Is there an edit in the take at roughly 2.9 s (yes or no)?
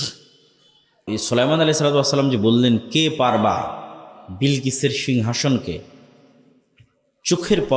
no